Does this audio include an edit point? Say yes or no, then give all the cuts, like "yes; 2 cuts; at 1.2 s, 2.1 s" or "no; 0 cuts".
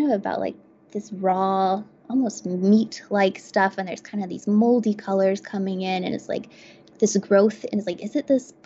no; 0 cuts